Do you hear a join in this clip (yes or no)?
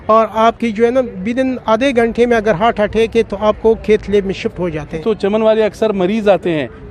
yes